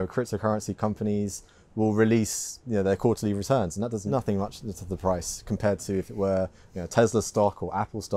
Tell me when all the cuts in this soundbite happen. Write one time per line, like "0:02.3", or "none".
0:04.0